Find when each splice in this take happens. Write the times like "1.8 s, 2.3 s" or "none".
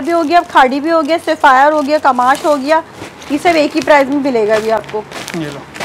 none